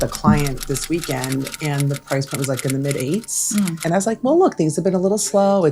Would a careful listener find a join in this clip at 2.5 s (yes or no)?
no